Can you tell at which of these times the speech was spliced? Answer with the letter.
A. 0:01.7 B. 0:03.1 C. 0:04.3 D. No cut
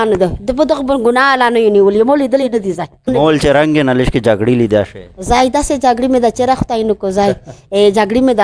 B